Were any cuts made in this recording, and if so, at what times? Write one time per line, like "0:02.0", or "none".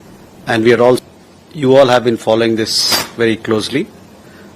0:01.0

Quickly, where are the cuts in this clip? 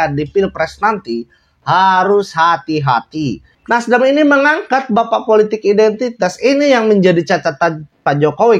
0:03.5

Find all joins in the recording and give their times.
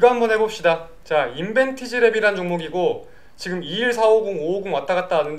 none

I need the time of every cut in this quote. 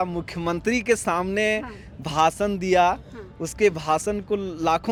none

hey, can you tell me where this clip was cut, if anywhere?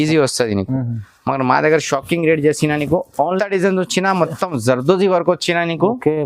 0:03.4

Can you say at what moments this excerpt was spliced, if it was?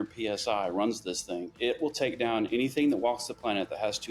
0:01.5

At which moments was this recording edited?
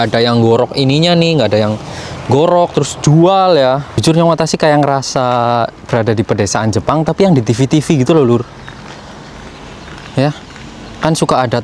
0:03.9

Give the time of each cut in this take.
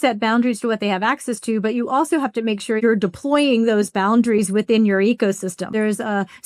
0:02.8
0:05.7

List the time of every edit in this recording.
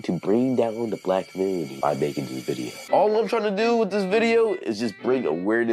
0:01.0

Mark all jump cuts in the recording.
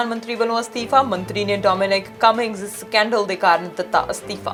none

